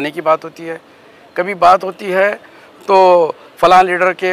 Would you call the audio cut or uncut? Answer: uncut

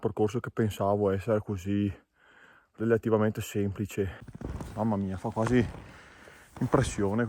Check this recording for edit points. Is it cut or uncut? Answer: cut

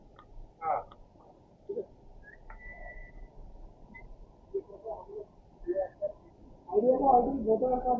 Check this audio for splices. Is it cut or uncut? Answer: uncut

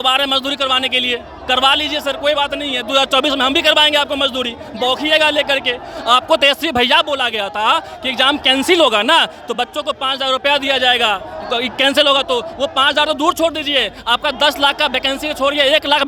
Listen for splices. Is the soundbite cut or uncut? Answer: uncut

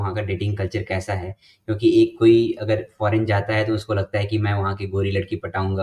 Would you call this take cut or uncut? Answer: uncut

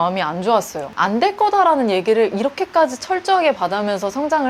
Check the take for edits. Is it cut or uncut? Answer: cut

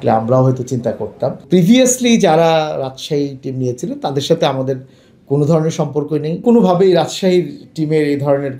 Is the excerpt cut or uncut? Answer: cut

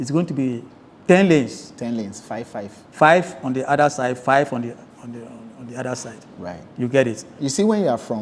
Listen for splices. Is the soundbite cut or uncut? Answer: cut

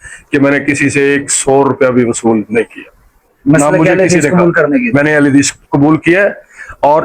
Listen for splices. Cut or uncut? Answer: uncut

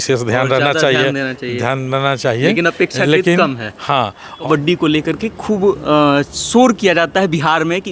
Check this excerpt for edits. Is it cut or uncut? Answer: cut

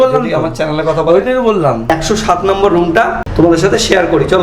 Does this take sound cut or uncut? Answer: cut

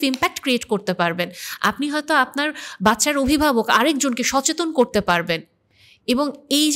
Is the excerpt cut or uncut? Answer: uncut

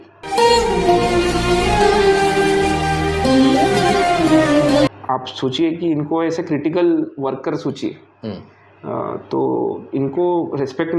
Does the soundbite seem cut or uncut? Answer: cut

